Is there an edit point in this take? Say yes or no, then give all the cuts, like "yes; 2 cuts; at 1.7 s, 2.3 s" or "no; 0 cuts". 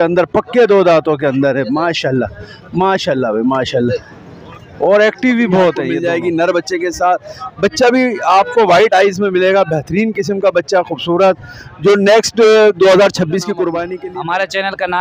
yes; 2 cuts; at 5.9 s, 13.9 s